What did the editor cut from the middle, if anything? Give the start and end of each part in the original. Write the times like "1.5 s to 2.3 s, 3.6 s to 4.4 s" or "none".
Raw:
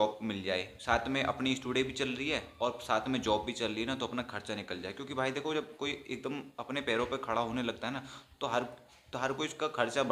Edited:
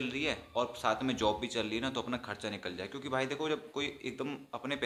none